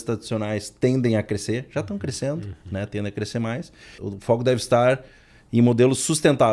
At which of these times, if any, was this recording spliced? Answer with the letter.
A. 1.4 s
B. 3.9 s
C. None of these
B